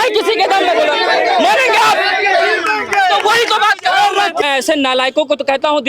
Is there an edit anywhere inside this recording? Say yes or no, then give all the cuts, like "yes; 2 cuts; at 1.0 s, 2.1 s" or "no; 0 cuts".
yes; 1 cut; at 4.4 s